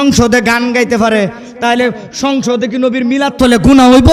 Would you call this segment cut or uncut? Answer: uncut